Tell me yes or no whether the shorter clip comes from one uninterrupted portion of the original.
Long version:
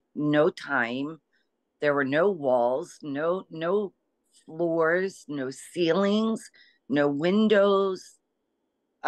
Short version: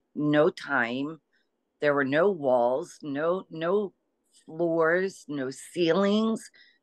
yes